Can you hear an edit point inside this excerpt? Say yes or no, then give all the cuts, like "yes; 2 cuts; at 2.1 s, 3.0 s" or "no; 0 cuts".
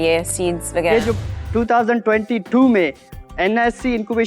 yes; 1 cut; at 1.2 s